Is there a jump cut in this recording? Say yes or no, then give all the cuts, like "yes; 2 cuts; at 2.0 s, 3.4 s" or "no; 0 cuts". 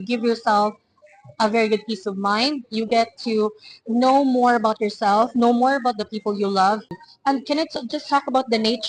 yes; 1 cut; at 7.0 s